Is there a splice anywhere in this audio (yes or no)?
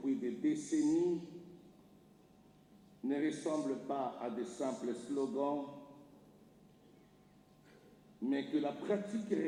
no